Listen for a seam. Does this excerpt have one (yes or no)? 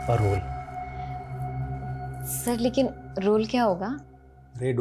no